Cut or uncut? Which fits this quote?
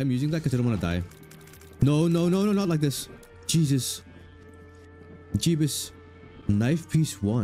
uncut